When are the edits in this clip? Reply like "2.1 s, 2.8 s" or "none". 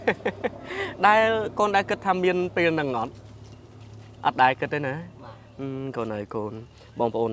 none